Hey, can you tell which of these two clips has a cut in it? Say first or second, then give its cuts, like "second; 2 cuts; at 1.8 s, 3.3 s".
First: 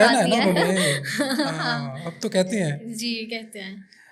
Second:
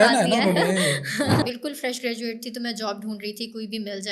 second; 1 cut; at 1.4 s